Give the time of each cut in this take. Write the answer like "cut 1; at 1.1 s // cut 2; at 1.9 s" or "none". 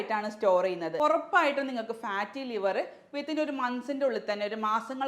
cut 1; at 0.9 s